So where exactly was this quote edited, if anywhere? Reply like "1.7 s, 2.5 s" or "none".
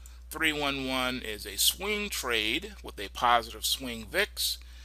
2.8 s